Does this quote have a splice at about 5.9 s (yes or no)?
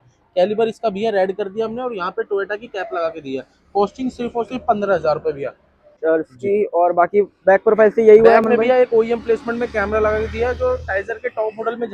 yes